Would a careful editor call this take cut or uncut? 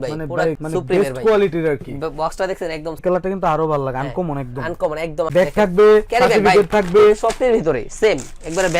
cut